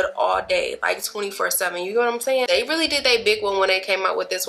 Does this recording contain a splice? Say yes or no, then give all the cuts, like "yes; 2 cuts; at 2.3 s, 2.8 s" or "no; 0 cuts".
yes; 1 cut; at 2.5 s